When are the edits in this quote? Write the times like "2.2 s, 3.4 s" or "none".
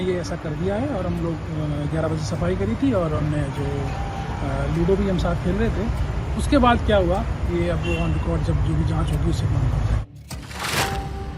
10.4 s